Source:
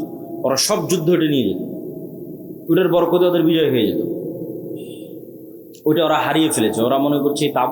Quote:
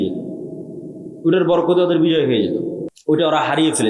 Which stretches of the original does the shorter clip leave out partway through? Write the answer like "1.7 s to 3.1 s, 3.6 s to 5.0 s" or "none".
4.3 s to 5.6 s